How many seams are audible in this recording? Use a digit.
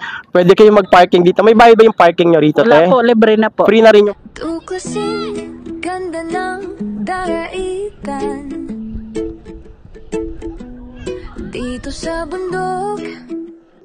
1